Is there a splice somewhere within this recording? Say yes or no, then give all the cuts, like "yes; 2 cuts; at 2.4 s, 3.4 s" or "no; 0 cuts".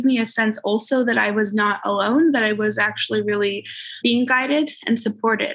yes; 1 cut; at 4.0 s